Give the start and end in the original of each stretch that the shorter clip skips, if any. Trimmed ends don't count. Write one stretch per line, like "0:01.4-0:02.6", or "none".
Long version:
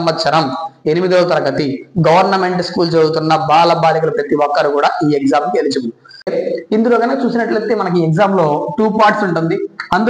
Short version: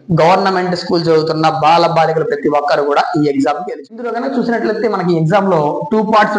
0:06.0-0:07.0